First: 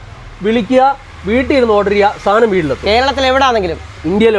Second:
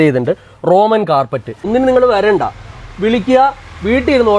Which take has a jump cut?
second; 1 cut; at 1.6 s

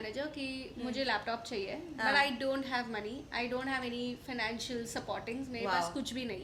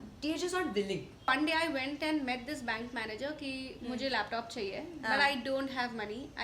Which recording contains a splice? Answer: second; 1 cut; at 1.3 s

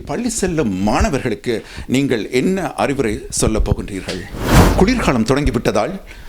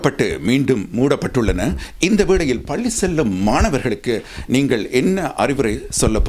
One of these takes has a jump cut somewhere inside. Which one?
first; 1 cut; at 4.7 s

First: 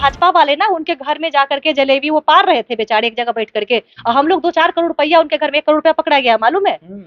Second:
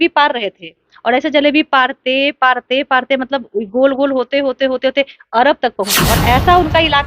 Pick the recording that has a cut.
second; 1 cut; at 5.9 s

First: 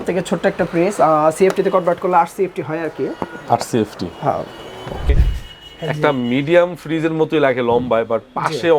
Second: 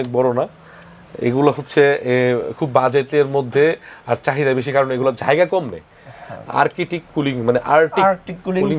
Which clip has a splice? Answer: first; 1 cut; at 5.1 s

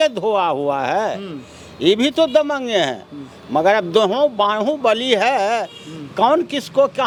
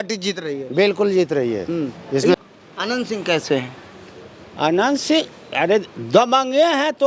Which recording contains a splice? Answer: second; 1 cut; at 2.3 s

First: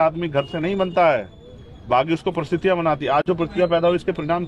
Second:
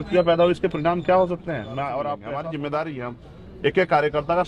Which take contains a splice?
second; 1 cut; at 2.2 s

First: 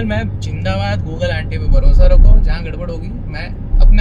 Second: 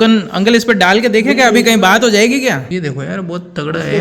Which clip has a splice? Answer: second; 1 cut; at 2.7 s

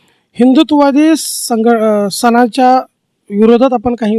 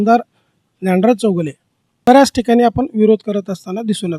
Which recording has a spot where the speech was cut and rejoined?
second; 1 cut; at 2.1 s

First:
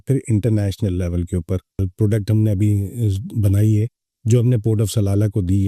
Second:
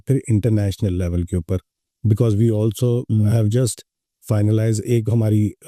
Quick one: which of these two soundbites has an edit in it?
first; 1 cut; at 1.9 s

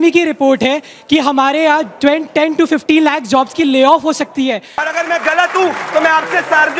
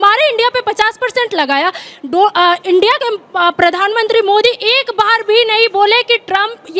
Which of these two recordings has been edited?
first; 1 cut; at 4.8 s

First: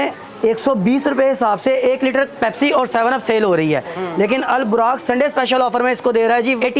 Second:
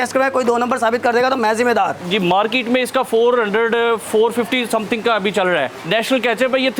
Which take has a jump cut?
second; 2 cuts; at 2.0 s, 5.8 s

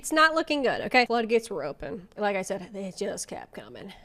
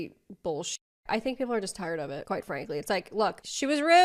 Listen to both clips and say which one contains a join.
first; 2 cuts; at 1.1 s, 2.1 s

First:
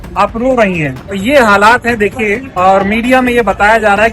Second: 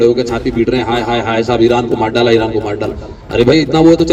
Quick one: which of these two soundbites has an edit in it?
first; 2 cuts; at 1.0 s, 2.5 s

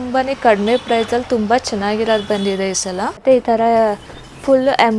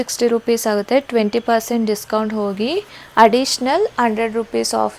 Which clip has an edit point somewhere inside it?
first; 1 cut; at 3.2 s

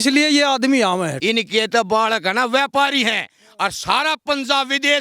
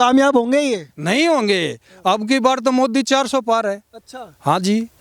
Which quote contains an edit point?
first; 1 cut; at 1.1 s

